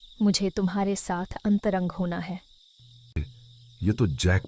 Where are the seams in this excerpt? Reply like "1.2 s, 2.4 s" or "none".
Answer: 3.2 s